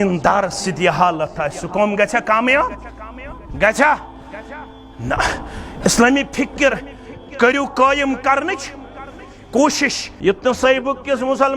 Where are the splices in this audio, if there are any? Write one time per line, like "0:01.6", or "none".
0:10.1